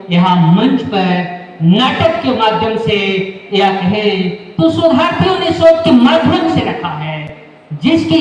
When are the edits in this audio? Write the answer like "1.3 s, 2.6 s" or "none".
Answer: none